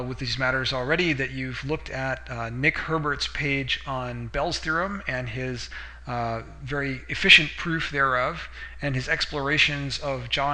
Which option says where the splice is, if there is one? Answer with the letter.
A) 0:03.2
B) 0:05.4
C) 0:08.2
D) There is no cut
B